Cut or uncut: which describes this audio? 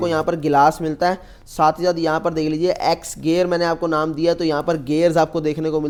uncut